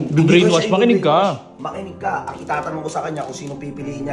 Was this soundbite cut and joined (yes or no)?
no